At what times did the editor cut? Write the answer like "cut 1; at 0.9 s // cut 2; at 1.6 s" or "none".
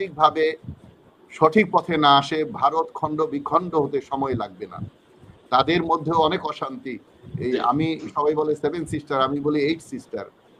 none